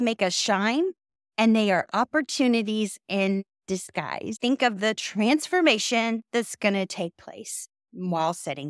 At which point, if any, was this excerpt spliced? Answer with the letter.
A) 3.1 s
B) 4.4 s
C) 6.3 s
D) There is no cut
B